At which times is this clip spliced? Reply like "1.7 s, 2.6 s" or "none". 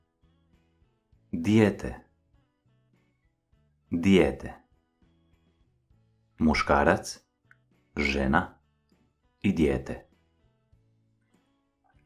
1.1 s, 4.6 s, 6.1 s, 10.1 s